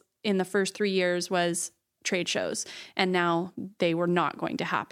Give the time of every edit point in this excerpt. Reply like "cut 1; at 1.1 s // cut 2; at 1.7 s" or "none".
none